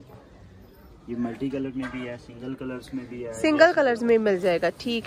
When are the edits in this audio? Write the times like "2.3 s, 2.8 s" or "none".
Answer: none

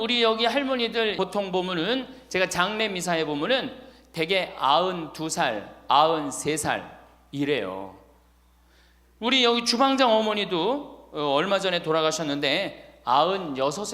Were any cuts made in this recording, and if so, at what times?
1.2 s

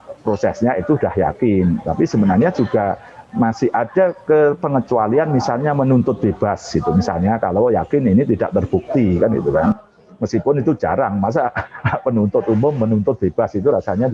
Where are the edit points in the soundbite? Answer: none

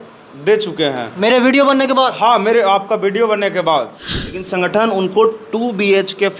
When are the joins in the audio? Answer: 4.4 s

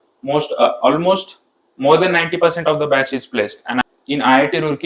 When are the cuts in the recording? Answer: 3.8 s

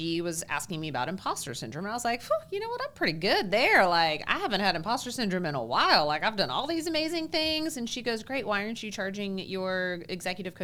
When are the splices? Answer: none

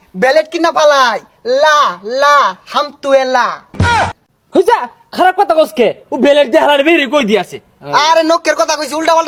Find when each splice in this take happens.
none

